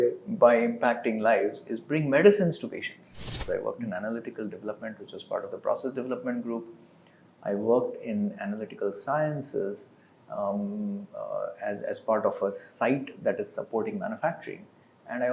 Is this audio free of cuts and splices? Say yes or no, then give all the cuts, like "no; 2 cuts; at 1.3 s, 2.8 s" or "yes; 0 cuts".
no; 1 cut; at 3.4 s